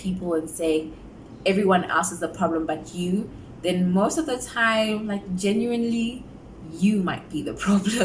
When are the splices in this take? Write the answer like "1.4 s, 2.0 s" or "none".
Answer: none